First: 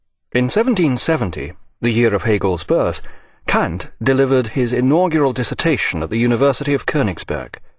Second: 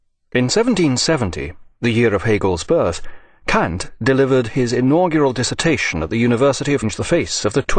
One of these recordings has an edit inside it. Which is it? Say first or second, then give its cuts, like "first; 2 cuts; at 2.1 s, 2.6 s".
first; 1 cut; at 6.8 s